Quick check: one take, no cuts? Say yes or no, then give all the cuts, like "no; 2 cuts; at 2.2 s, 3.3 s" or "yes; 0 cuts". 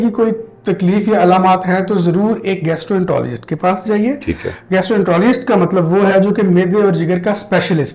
yes; 0 cuts